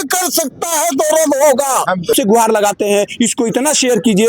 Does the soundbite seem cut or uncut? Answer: cut